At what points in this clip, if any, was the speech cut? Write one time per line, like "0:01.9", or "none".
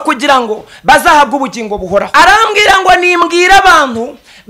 0:02.1